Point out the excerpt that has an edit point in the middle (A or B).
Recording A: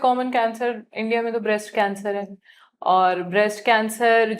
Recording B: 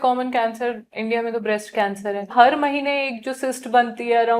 B